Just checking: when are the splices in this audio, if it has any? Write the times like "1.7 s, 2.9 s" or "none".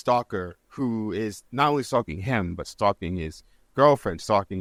none